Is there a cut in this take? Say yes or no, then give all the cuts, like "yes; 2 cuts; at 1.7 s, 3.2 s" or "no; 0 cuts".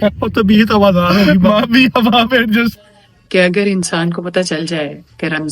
yes; 1 cut; at 2.7 s